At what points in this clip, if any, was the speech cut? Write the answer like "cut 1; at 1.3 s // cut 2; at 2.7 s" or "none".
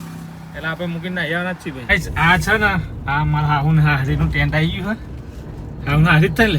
cut 1; at 1.8 s